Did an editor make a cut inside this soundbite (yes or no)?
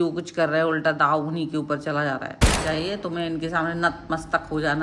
yes